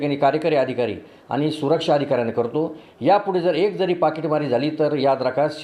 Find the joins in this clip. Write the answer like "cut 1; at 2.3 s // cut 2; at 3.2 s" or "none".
none